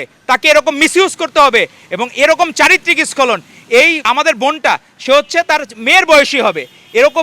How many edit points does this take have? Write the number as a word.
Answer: one